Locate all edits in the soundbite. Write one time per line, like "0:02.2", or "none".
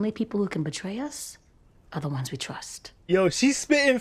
none